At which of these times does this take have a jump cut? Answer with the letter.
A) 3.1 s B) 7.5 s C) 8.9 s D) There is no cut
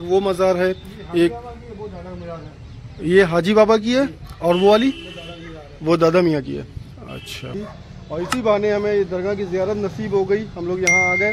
B